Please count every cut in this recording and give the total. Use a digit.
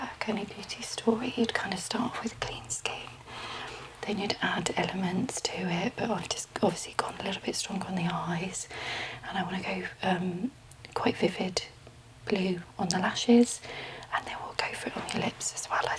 0